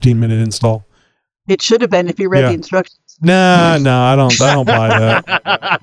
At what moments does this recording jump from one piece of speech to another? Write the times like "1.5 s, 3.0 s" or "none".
none